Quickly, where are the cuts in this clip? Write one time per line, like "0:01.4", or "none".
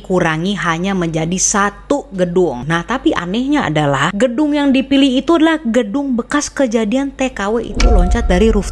0:02.6
0:04.0